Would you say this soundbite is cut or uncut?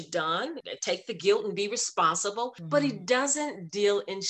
uncut